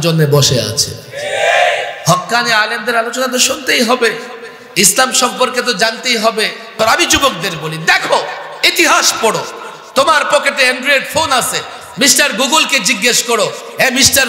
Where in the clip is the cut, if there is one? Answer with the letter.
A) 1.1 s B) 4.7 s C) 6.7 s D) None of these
C